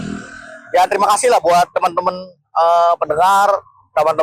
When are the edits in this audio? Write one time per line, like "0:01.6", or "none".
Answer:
none

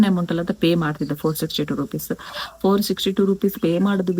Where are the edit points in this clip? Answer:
none

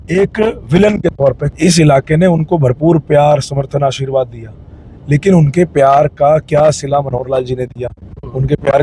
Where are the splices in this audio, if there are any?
0:01.4

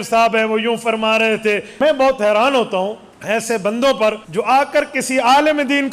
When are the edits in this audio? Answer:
0:01.7
0:03.1
0:04.2

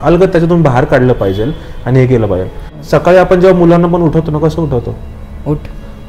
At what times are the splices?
none

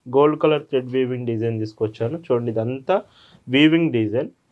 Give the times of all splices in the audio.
none

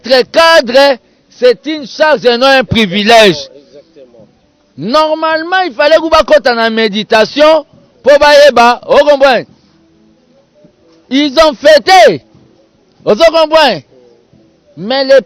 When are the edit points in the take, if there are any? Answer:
none

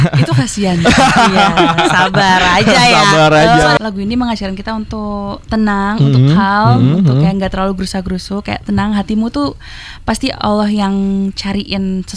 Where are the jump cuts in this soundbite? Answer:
0:03.8

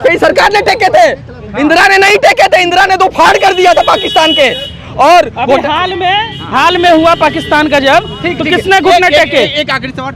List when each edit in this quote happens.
none

